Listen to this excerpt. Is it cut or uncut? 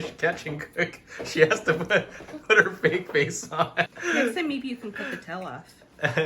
cut